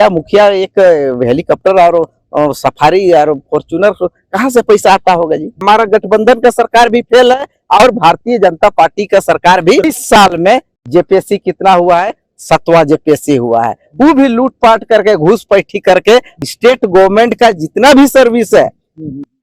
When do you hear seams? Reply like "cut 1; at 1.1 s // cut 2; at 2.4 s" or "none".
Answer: cut 1; at 5.6 s // cut 2; at 9.8 s // cut 3; at 16.3 s